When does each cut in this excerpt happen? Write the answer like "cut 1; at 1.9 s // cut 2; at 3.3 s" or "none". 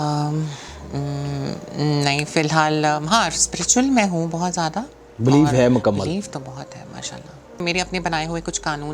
cut 1; at 7.5 s